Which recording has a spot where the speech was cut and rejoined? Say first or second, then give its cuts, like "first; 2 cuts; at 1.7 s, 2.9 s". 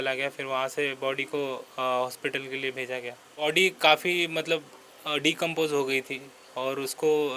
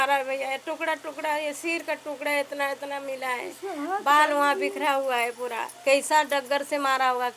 first; 1 cut; at 3.4 s